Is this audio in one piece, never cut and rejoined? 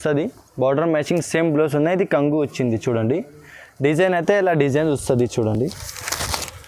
yes; 0 cuts

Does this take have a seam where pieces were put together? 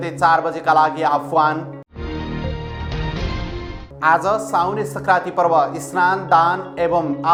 no; 0 cuts

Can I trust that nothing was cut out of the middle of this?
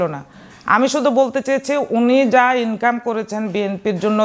yes; 0 cuts

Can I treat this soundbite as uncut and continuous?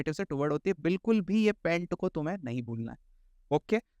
yes; 0 cuts

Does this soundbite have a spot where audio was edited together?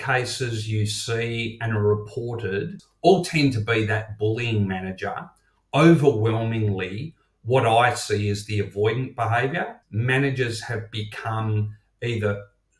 yes; 2 cuts; at 2.8 s, 9.8 s

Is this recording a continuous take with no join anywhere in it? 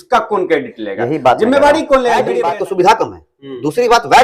no; 1 cut; at 2.3 s

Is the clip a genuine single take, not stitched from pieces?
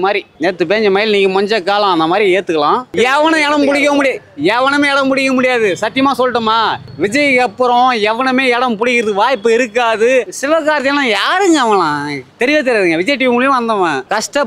no; 3 cuts; at 2.9 s, 6.8 s, 10.3 s

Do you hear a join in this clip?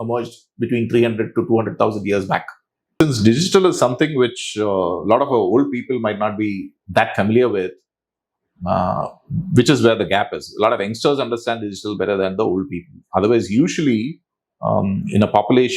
yes; 1 cut; at 2.9 s

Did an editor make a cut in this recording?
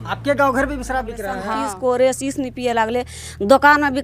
yes; 1 cut; at 1.3 s

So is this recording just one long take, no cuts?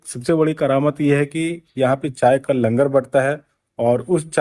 yes; 0 cuts

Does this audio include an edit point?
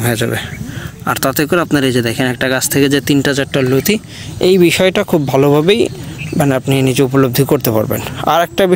no; 0 cuts

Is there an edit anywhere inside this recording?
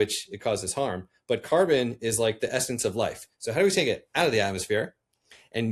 no; 0 cuts

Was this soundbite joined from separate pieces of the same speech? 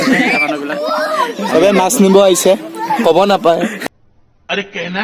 yes; 1 cut; at 3.8 s

